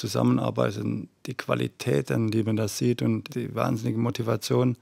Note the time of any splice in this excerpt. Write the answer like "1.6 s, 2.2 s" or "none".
3.3 s